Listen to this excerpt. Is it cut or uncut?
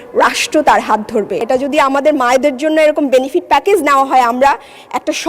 cut